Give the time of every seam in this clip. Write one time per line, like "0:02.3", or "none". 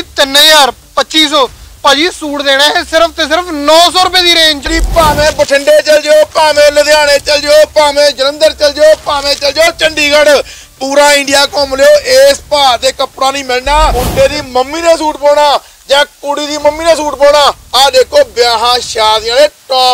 0:04.7
0:14.0

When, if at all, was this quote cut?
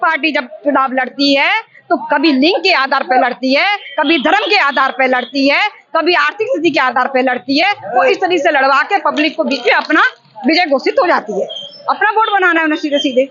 none

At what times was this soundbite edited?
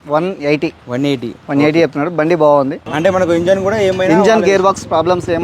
0:02.8

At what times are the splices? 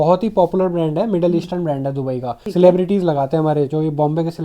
0:02.4

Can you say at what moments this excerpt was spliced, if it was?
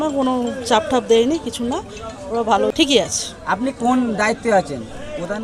0:02.7

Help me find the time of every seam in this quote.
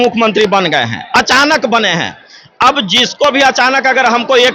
none

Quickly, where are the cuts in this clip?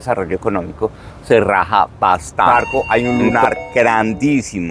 0:02.5

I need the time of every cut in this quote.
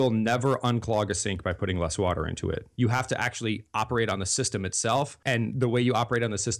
0:02.7
0:05.2

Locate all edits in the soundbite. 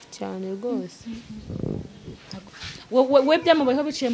0:02.3

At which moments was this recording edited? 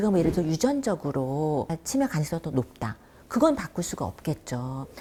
none

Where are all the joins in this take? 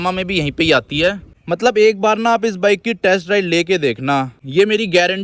0:01.3
0:04.4

